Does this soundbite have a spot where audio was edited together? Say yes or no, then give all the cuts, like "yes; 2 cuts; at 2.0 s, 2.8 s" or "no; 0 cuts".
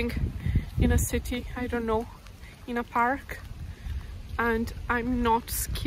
no; 0 cuts